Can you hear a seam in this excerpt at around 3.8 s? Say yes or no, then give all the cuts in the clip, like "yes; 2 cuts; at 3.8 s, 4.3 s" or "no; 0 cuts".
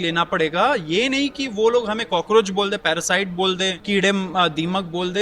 yes; 1 cut; at 3.8 s